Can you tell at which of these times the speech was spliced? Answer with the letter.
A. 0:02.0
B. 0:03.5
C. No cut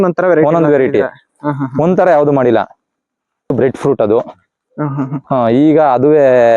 B